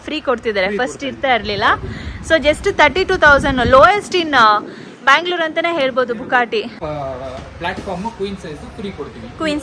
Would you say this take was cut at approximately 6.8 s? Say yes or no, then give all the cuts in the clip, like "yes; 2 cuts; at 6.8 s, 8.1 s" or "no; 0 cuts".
yes; 1 cut; at 6.8 s